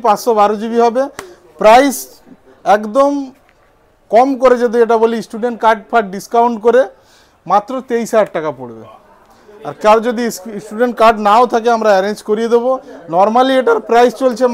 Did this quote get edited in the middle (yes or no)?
no